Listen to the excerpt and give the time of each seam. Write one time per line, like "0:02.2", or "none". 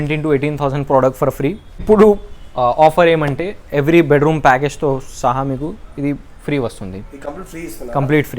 0:01.8

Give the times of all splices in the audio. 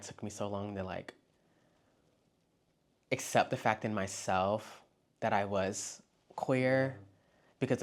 none

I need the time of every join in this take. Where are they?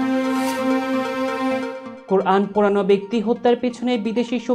none

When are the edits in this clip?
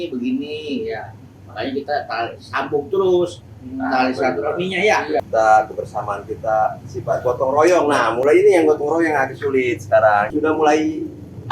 0:05.2
0:10.3

